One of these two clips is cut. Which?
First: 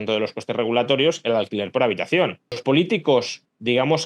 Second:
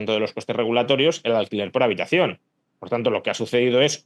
first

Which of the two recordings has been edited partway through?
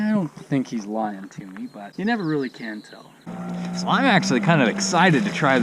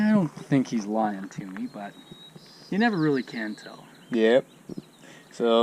first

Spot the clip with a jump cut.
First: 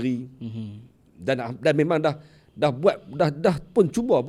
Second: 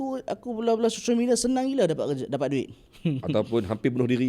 second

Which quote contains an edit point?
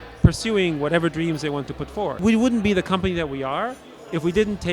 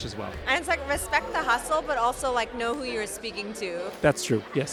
first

